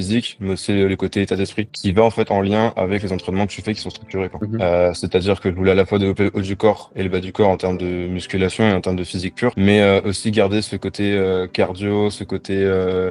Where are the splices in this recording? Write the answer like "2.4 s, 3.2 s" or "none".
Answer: 1.8 s, 4.4 s

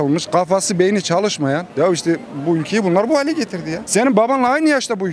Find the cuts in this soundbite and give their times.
1.7 s, 3.8 s

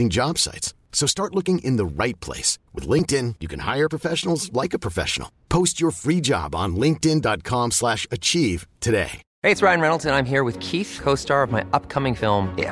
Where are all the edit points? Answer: 9.2 s

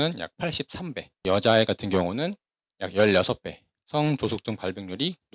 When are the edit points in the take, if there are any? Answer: 1.3 s

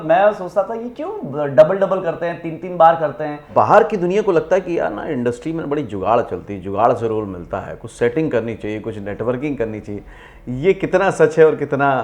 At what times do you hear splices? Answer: 3.5 s

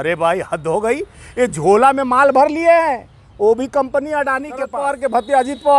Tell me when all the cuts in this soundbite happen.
4.7 s

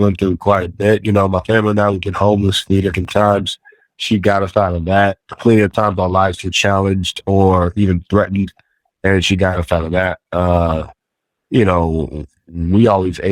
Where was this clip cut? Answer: none

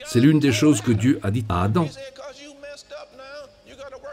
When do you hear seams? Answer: 1.9 s

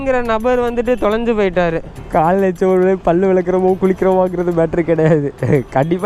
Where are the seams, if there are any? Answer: 1.9 s

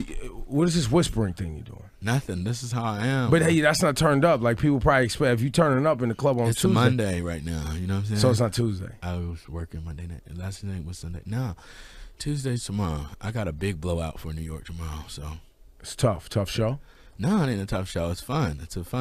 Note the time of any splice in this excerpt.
none

